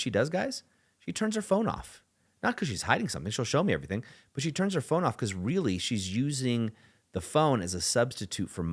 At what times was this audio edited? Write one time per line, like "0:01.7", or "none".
none